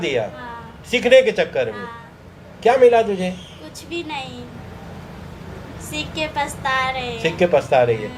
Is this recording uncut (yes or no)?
yes